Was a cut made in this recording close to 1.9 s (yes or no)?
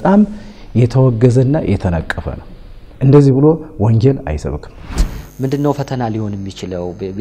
no